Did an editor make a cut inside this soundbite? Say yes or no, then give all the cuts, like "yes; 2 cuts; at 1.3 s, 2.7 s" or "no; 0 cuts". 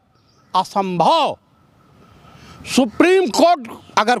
no; 0 cuts